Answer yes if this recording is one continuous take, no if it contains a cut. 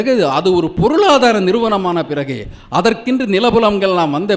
yes